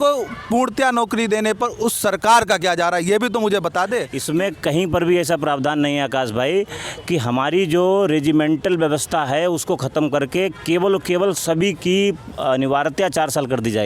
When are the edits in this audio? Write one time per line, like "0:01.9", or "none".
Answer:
0:04.2